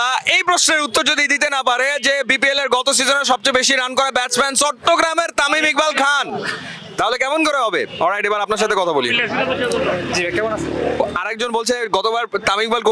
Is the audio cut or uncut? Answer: uncut